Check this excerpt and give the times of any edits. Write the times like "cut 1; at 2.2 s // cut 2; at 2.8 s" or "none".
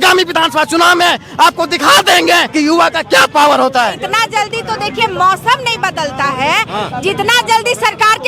cut 1; at 2.5 s // cut 2; at 3.9 s

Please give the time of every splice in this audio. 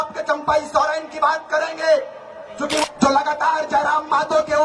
cut 1; at 2.8 s

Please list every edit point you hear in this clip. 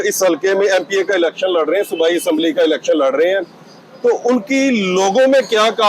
none

